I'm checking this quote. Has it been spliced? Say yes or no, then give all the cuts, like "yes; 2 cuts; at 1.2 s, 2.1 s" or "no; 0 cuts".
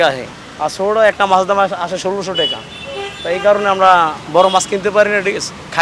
no; 0 cuts